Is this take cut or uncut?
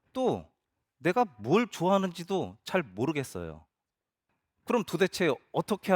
cut